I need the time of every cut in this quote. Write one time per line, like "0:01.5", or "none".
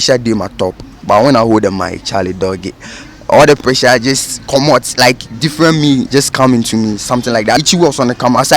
0:07.6